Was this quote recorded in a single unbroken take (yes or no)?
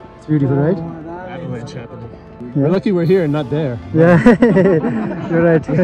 no